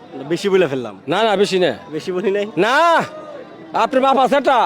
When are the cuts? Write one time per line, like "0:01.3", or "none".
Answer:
none